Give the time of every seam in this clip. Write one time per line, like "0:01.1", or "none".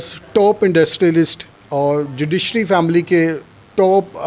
none